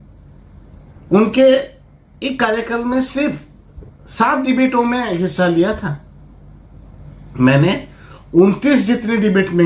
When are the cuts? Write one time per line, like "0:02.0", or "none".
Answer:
none